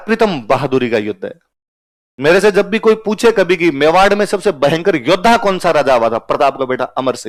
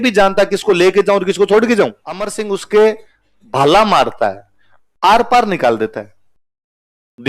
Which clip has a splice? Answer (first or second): second